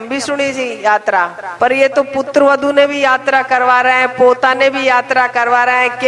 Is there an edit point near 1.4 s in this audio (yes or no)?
yes